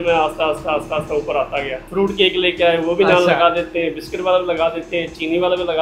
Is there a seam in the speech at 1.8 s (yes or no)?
yes